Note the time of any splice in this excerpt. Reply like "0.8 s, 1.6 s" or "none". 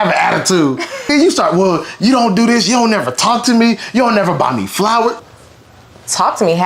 1.1 s, 5.2 s